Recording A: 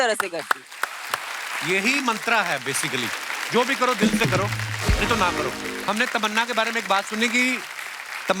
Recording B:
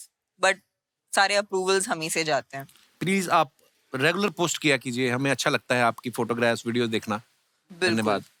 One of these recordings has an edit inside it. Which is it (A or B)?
A